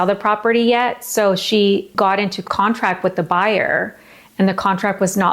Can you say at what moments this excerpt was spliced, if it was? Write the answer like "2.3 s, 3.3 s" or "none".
2.0 s